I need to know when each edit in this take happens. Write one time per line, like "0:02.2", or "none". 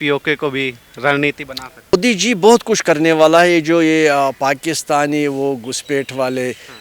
0:01.9